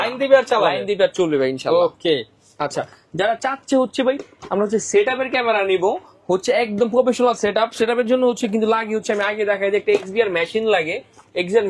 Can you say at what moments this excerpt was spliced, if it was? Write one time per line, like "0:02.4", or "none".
none